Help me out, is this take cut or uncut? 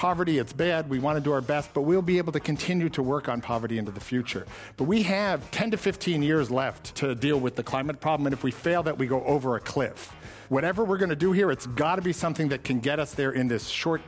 cut